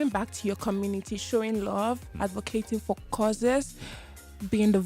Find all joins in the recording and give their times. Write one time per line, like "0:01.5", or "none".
none